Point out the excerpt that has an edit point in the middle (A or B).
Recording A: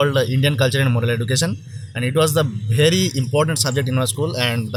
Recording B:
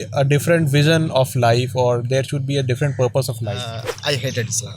B